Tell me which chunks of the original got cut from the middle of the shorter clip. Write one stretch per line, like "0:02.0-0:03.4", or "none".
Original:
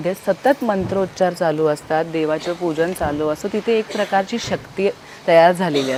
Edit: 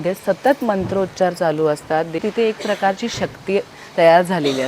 0:02.2-0:03.5